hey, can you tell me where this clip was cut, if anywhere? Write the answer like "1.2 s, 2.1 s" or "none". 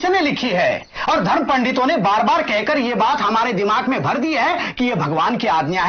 none